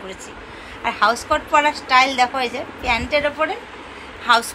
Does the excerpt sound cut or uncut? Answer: uncut